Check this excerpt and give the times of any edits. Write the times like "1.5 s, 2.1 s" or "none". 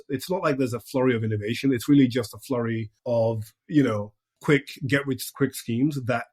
2.9 s, 4.3 s, 5.3 s